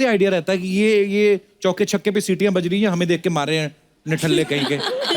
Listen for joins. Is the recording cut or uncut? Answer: uncut